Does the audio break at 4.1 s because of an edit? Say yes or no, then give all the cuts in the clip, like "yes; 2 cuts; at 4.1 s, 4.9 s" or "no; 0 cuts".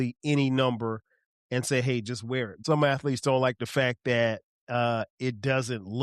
no; 1 cut; at 2.5 s